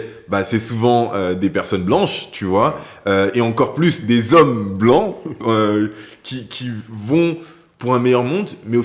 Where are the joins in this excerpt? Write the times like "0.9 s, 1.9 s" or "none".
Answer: none